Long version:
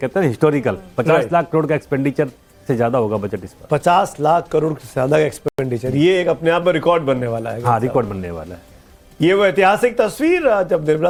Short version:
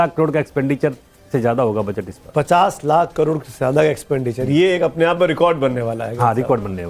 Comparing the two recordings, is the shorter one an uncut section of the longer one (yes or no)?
no